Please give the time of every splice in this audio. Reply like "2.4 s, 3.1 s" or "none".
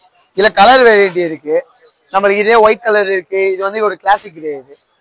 none